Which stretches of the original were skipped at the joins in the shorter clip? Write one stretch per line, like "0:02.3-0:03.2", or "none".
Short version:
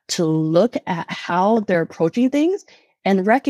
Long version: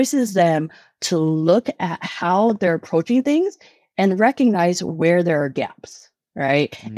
none